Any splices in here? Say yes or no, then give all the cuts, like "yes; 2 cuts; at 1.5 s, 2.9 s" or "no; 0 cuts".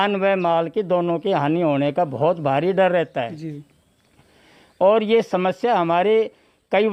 no; 0 cuts